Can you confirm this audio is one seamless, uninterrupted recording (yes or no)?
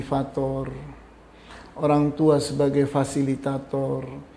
yes